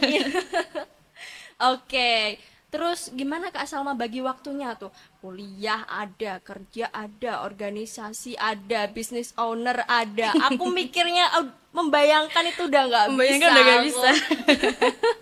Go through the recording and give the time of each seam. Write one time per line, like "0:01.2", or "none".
none

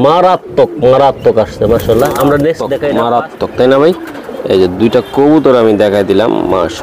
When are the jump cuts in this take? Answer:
0:03.2

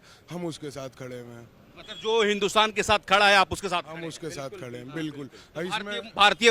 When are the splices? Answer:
none

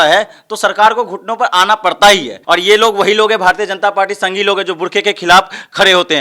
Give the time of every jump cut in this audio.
0:02.4

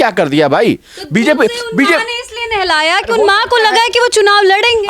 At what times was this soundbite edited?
none

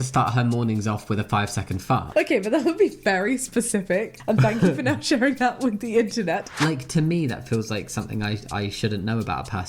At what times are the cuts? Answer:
0:06.6

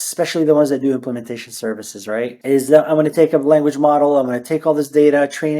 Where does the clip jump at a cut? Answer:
0:02.4

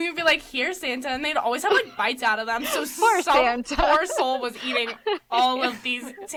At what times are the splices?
none

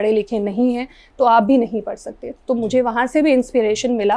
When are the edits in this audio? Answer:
none

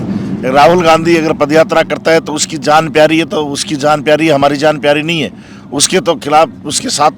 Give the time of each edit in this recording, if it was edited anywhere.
none

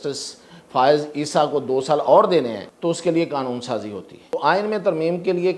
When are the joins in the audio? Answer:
0:02.6
0:04.3

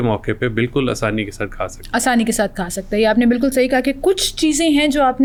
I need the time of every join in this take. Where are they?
none

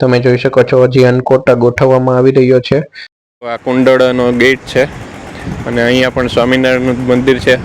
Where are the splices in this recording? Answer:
0:03.5

